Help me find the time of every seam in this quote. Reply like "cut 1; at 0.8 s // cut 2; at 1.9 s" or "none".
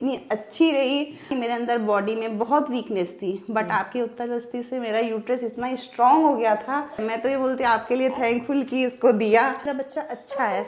cut 1; at 1.3 s // cut 2; at 7.0 s // cut 3; at 9.7 s

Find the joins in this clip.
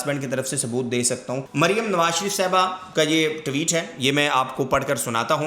cut 1; at 1.4 s

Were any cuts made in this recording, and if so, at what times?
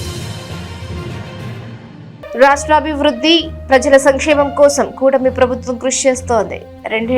cut 1; at 2.3 s

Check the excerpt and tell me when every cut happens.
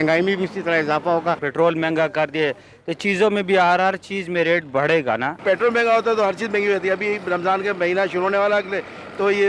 cut 1; at 1.4 s // cut 2; at 5.4 s

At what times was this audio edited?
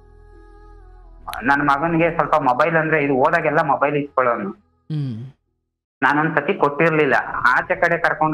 cut 1; at 1.2 s

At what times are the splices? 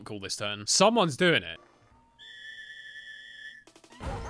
cut 1; at 1.5 s

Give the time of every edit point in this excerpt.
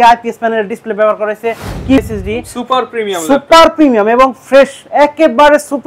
cut 1; at 2.0 s

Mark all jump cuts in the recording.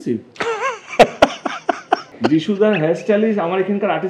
cut 1; at 2.1 s

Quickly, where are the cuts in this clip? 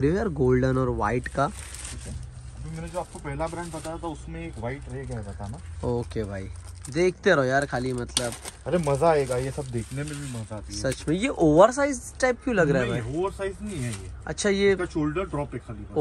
none

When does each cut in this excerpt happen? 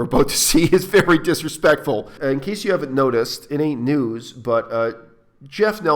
cut 1; at 2.1 s

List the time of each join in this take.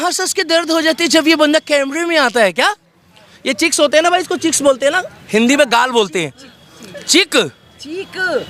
none

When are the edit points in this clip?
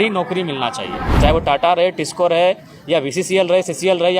cut 1; at 1.1 s

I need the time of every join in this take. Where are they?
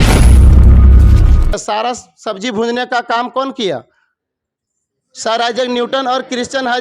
cut 1; at 1.5 s

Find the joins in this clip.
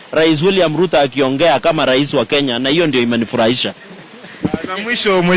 none

